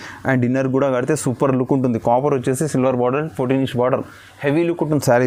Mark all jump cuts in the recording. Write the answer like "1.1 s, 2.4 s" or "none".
none